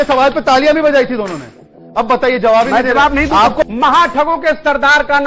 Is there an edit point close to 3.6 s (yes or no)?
yes